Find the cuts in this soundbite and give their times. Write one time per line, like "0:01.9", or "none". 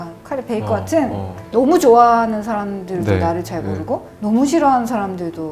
0:01.4